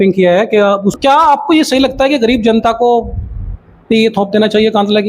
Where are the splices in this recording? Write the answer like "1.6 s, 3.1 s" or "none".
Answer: 1.0 s